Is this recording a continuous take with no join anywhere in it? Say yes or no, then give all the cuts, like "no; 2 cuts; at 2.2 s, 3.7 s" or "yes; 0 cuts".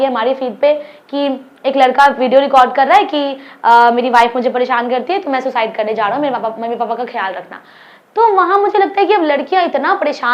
yes; 0 cuts